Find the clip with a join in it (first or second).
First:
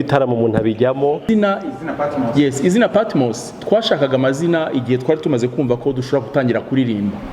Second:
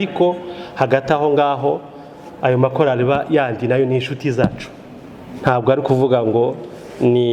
first